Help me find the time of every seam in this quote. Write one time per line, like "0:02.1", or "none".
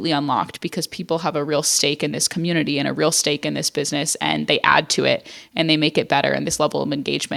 none